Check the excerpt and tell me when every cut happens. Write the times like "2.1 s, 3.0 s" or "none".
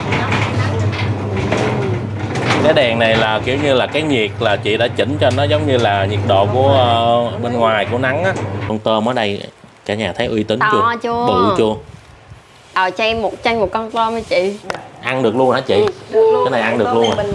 8.6 s